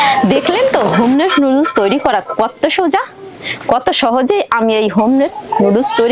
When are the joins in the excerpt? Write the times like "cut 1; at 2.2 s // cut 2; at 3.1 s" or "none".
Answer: none